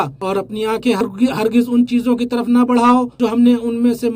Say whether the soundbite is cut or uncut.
cut